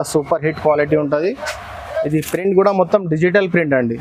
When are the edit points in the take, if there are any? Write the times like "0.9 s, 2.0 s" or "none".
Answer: none